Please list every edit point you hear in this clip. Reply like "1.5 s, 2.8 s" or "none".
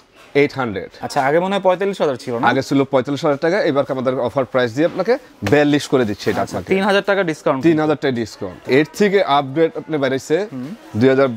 0.9 s, 8.6 s